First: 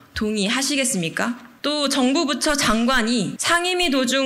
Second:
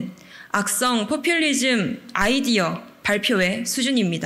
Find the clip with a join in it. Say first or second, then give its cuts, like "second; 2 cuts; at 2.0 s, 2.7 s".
first; 2 cuts; at 1.5 s, 3.4 s